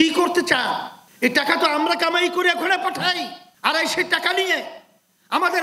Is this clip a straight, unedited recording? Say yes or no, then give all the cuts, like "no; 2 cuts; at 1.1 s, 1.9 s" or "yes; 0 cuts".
yes; 0 cuts